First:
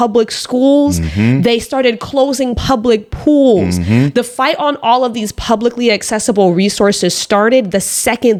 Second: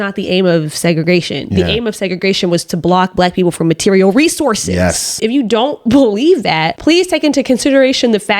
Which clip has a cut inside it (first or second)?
second